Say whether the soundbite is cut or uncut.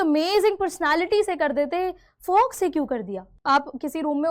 cut